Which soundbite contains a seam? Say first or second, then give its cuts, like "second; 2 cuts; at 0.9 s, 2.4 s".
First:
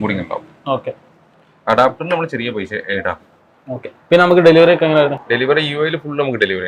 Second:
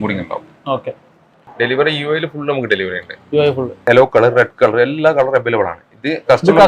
second; 2 cuts; at 1.5 s, 3.8 s